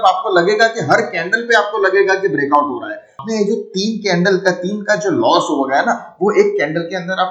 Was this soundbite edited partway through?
yes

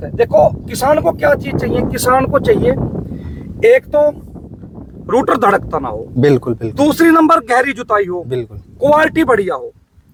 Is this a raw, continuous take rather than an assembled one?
yes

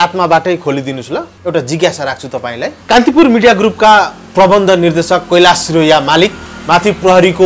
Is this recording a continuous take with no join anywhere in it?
no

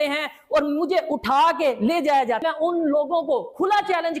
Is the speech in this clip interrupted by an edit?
yes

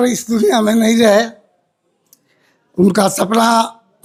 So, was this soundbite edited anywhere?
no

